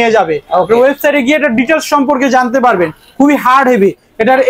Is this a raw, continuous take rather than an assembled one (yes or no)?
yes